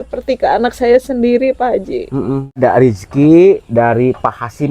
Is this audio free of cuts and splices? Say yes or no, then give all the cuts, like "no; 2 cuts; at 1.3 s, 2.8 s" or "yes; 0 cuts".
no; 1 cut; at 2.6 s